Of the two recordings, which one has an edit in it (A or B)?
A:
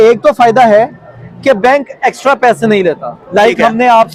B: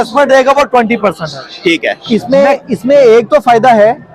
B